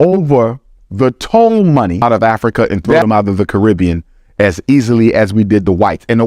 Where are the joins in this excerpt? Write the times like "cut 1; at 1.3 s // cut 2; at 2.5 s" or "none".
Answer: cut 1; at 2.0 s